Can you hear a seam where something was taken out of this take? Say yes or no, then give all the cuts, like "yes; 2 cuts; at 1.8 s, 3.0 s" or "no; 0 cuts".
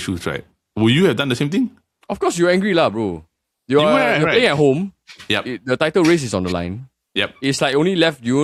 no; 0 cuts